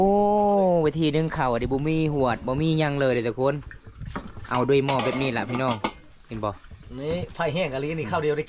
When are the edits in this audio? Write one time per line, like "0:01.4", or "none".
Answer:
none

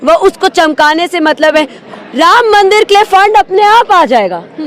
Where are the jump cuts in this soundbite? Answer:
0:01.8

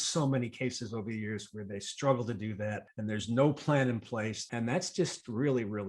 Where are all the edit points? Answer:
0:02.9
0:04.5

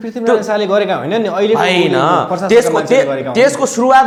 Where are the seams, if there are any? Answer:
none

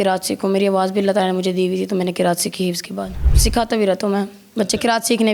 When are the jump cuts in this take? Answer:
0:03.4

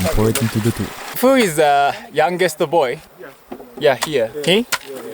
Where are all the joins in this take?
0:01.0
0:04.3

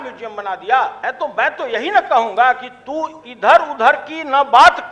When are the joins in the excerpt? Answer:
0:01.0

